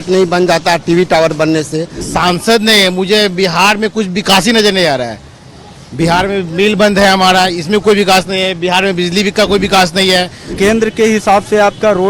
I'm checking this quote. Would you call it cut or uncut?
cut